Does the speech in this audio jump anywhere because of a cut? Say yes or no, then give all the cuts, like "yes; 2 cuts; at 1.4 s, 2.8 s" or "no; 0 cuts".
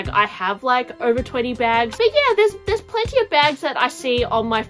yes; 1 cut; at 1.9 s